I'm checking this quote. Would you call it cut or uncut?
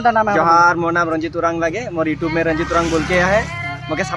uncut